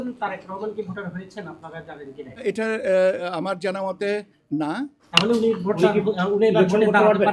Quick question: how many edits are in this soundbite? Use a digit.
0